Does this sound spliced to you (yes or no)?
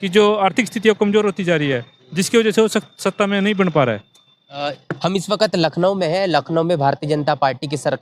no